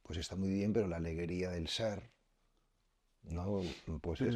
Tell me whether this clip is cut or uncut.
uncut